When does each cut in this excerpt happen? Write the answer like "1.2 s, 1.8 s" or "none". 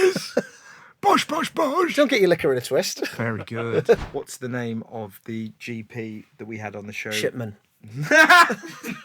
3.0 s, 4.0 s